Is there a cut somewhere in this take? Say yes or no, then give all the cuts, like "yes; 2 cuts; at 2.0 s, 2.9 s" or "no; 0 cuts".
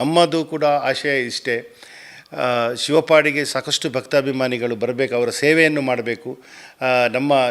no; 0 cuts